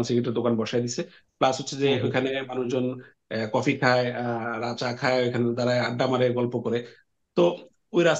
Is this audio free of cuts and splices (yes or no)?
yes